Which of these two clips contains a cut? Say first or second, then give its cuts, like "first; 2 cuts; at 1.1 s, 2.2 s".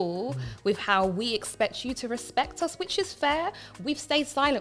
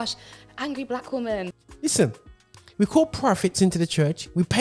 second; 1 cut; at 1.6 s